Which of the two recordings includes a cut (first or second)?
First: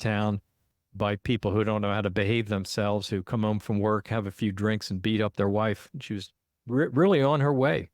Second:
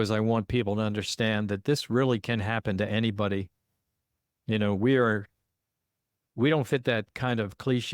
first